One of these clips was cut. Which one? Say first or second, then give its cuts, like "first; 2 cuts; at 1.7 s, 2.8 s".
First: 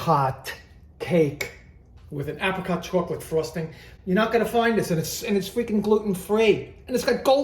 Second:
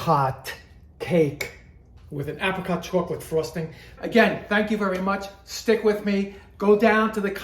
second; 1 cut; at 4.0 s